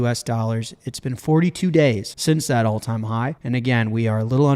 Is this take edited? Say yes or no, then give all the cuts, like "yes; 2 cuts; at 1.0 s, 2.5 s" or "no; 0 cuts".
yes; 2 cuts; at 2.1 s, 3.4 s